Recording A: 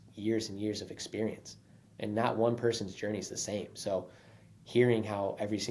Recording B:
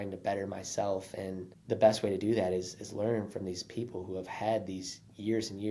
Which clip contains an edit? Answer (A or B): B